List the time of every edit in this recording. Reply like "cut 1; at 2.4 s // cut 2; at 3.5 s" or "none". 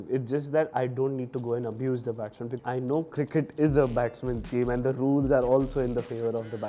cut 1; at 2.6 s